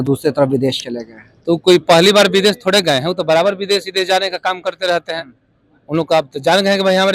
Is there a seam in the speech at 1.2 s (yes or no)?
no